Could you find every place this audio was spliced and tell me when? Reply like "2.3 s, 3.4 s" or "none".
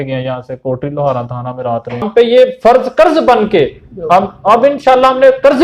2.1 s